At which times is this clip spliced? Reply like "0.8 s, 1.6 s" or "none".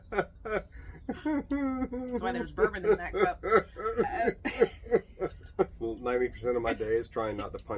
5.7 s